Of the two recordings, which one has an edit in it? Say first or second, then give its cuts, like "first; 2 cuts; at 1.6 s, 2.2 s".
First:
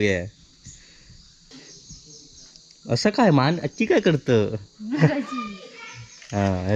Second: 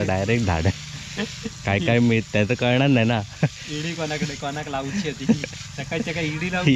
first; 1 cut; at 1.3 s